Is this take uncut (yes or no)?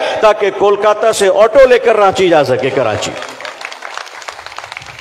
yes